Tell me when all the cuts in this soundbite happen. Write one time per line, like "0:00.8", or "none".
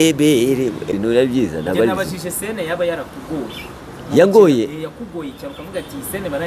0:01.0